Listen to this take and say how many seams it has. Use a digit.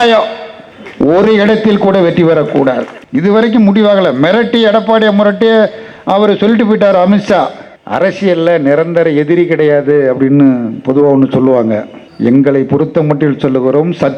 2